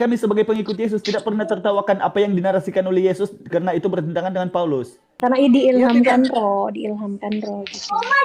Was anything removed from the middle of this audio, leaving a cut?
yes; 1 cut; at 5.0 s

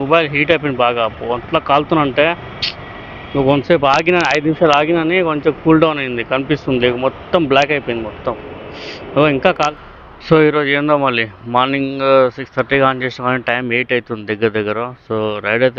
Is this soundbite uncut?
no; 1 cut; at 9.7 s

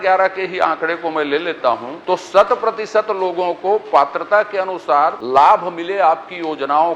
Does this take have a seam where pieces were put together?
yes; 2 cuts; at 1.9 s, 5.2 s

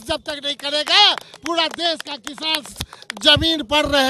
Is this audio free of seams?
yes; 0 cuts

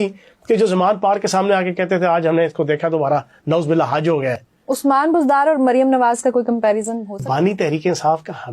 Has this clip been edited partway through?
yes; 2 cuts; at 4.5 s, 7.2 s

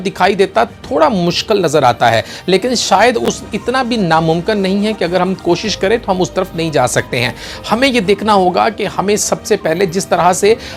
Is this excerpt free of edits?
yes; 0 cuts

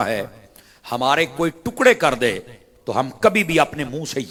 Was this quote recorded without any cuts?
yes; 0 cuts

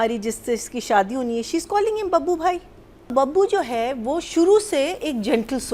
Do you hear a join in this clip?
yes; 1 cut; at 3.1 s

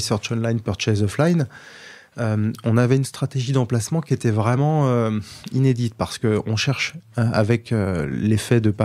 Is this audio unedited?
yes; 0 cuts

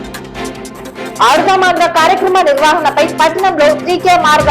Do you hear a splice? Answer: yes; 1 cut; at 1.1 s

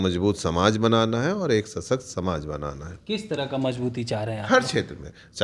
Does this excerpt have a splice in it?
no; 0 cuts

